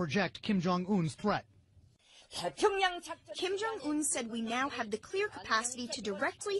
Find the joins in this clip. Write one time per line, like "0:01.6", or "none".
0:05.7